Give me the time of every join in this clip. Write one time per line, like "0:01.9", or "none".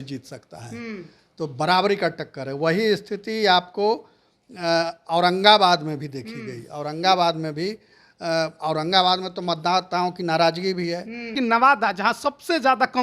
0:11.3

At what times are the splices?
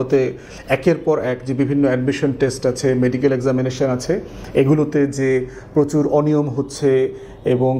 none

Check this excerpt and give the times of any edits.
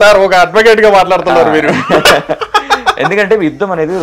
none

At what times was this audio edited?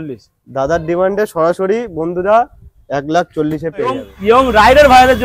0:04.1

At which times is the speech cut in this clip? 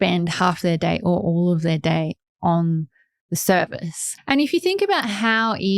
0:04.0

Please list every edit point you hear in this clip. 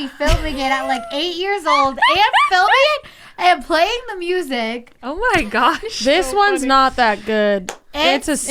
none

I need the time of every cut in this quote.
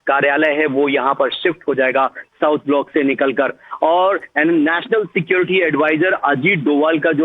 0:01.1

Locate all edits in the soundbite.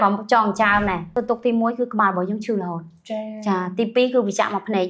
0:01.1

